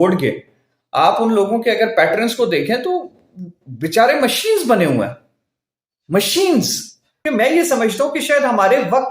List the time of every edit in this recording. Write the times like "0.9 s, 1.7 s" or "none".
7.2 s